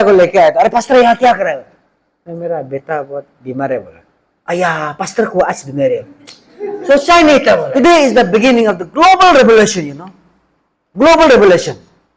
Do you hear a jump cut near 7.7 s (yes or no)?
yes